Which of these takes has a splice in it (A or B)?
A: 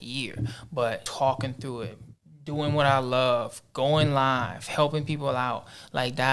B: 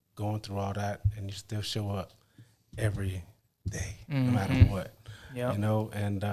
A